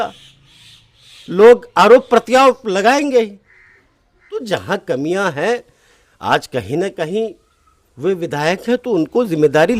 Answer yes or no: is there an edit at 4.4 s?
yes